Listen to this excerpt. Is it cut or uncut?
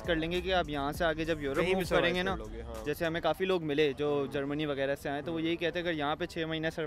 uncut